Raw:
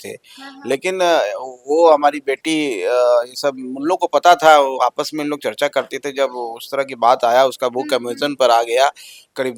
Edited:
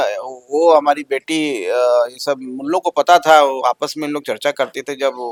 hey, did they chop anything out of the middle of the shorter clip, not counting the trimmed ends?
no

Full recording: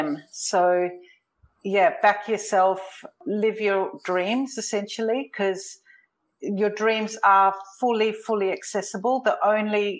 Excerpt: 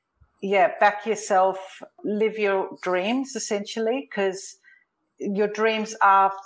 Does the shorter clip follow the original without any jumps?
yes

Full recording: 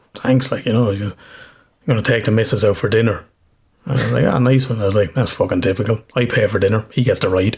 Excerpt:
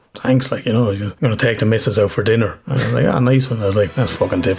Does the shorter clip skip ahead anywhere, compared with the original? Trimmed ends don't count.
yes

